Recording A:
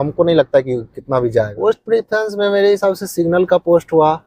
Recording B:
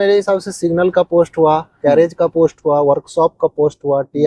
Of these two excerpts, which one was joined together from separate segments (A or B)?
A